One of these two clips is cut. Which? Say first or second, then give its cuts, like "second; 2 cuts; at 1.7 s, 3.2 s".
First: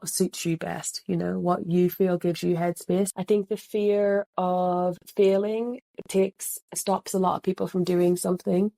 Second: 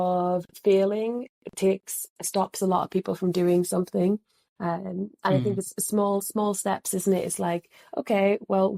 first; 1 cut; at 3.1 s